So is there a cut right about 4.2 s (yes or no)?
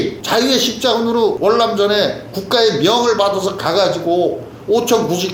no